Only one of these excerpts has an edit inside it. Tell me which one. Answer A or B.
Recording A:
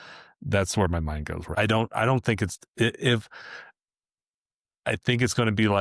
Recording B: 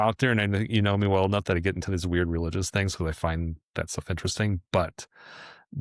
A